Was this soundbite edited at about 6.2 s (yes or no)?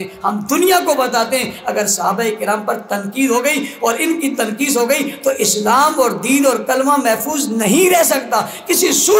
no